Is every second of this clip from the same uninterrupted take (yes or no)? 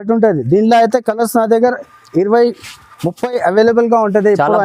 yes